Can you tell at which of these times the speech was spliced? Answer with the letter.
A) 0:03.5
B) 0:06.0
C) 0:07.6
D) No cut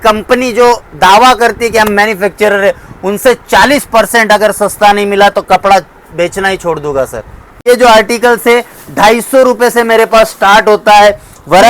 C